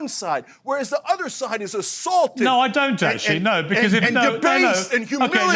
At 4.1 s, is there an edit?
no; 0 cuts

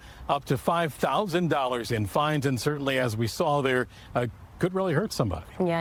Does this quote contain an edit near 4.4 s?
no; 0 cuts

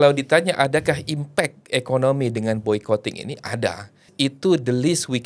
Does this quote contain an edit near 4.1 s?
yes; 1 cut; at 4.1 s

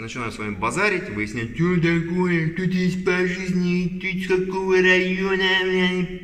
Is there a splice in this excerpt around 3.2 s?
no; 0 cuts

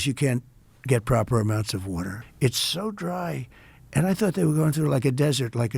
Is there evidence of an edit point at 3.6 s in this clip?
no; 1 cut; at 2.2 s

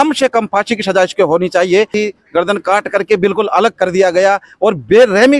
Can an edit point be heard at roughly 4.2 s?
no; 1 cut; at 1.9 s

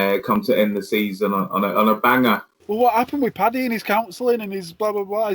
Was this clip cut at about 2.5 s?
yes; 1 cut; at 2.5 s

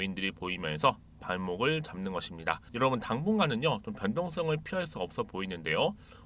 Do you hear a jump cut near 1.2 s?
no; 1 cut; at 2.7 s

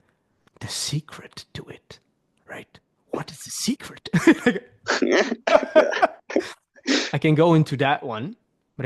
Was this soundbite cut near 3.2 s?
no; 1 cut; at 7.1 s

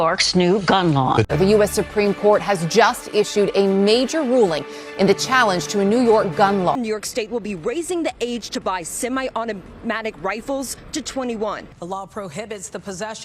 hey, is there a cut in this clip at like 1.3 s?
yes; 3 cuts; at 1.3 s, 6.7 s, 11.7 s

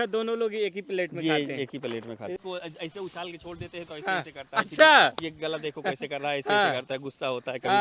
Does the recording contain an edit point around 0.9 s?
no; 1 cut; at 2.4 s

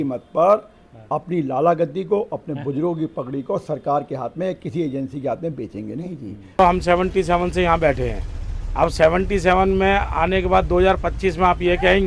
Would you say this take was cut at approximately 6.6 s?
yes; 1 cut; at 6.6 s

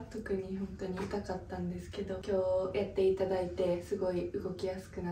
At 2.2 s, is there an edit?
yes; 1 cut; at 2.2 s

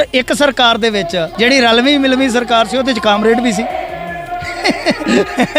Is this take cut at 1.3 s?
yes; 1 cut; at 1.3 s

